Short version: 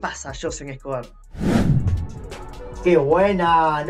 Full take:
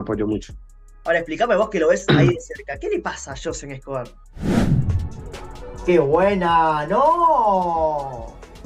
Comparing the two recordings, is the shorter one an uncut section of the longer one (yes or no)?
yes